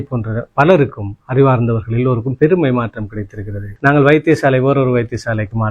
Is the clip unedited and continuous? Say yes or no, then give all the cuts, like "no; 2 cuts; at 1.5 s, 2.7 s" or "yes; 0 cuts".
no; 1 cut; at 3.7 s